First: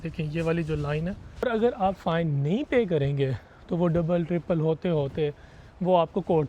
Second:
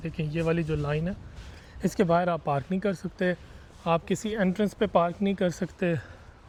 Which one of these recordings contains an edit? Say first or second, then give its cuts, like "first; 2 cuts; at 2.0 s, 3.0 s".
first; 1 cut; at 1.4 s